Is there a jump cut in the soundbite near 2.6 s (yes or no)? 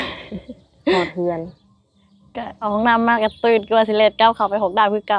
yes